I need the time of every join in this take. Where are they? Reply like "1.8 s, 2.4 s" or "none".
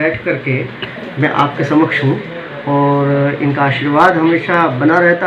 none